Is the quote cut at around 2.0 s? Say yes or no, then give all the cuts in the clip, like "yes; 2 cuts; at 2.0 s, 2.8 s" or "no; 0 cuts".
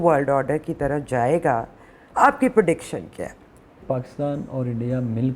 no; 1 cut; at 3.8 s